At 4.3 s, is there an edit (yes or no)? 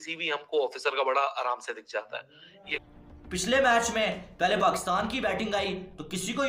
no